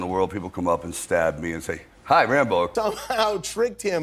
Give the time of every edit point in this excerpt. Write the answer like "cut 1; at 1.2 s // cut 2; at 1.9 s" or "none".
none